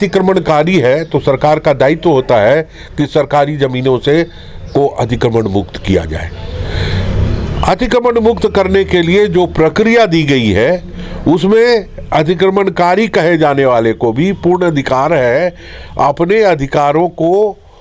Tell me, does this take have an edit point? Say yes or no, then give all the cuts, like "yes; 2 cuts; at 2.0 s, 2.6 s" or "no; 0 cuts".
no; 0 cuts